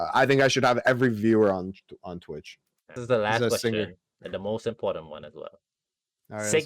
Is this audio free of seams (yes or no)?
no